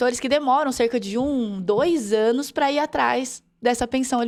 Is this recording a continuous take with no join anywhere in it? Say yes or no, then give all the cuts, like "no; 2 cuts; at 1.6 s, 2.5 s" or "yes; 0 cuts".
yes; 0 cuts